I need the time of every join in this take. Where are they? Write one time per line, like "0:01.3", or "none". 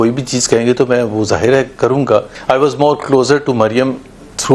0:02.3